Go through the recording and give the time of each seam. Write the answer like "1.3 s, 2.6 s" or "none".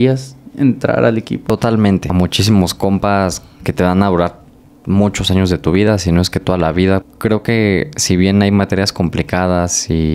1.4 s, 2.1 s, 7.1 s